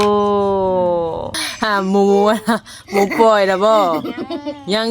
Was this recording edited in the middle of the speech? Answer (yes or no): yes